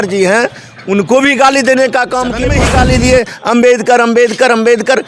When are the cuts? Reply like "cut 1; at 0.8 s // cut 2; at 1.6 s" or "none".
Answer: cut 1; at 2.5 s